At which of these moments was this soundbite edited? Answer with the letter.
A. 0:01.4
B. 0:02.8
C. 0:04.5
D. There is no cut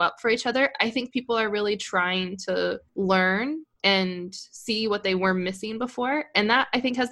B